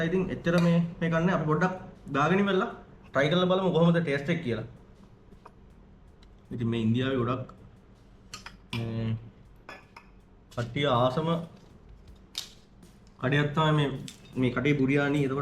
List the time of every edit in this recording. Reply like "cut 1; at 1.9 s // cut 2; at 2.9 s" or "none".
none